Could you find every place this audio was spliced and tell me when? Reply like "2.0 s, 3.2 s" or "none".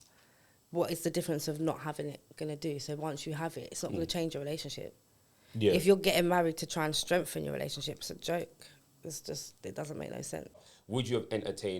10.7 s